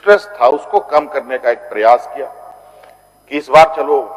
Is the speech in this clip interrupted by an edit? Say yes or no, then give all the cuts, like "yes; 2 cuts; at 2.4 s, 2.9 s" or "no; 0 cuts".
no; 0 cuts